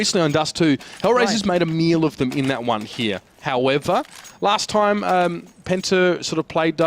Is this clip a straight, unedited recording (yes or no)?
no